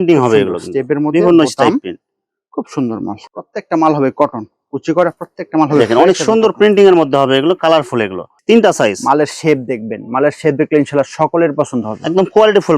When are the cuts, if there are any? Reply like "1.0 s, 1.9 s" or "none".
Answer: 3.3 s, 8.2 s